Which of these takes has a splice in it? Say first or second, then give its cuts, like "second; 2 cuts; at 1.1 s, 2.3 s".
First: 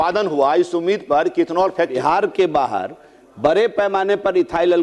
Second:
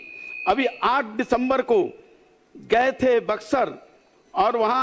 first; 1 cut; at 1.9 s